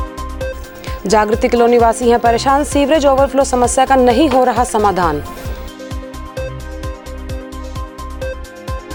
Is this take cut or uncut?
uncut